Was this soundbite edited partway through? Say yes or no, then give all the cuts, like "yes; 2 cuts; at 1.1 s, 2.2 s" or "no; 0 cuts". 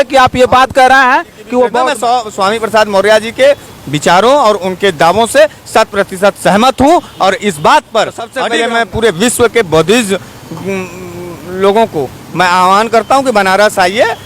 yes; 2 cuts; at 1.9 s, 8.4 s